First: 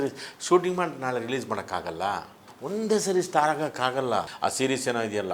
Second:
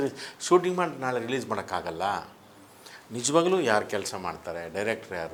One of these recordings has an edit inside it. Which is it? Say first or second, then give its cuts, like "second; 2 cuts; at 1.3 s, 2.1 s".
first; 2 cuts; at 2.5 s, 4.3 s